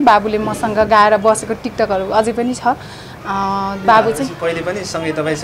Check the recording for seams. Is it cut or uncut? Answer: uncut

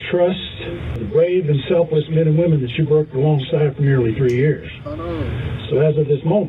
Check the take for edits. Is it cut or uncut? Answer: cut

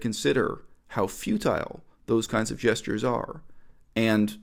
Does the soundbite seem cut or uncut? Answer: uncut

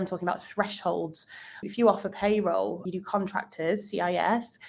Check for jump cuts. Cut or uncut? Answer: cut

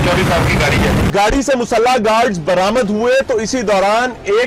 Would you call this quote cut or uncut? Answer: cut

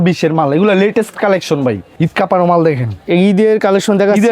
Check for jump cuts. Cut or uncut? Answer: cut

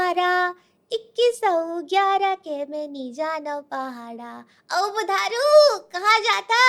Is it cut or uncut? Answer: uncut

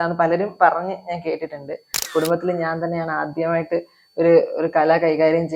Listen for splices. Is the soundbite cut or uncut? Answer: cut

